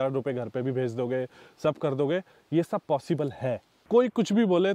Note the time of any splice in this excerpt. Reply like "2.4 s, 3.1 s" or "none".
3.7 s

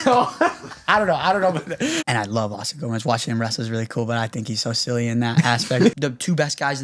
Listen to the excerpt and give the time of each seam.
2.0 s, 5.9 s

